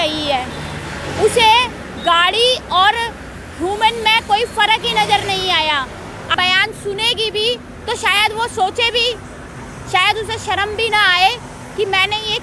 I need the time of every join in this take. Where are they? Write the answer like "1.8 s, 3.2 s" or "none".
6.3 s